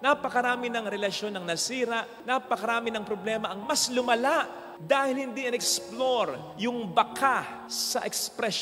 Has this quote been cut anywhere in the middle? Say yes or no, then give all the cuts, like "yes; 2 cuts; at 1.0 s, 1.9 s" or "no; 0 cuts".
no; 0 cuts